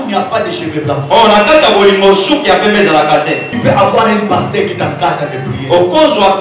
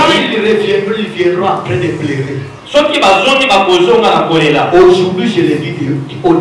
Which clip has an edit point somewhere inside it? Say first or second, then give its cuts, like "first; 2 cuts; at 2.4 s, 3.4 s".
first; 1 cut; at 3.5 s